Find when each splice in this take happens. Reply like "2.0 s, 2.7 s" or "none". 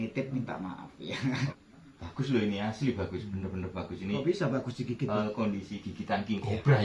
1.5 s, 5.2 s